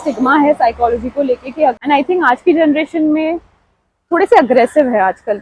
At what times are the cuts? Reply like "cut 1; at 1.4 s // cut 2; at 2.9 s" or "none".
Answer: cut 1; at 1.8 s